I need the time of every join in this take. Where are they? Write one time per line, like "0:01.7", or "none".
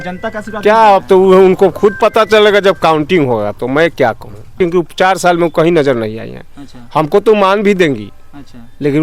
0:04.6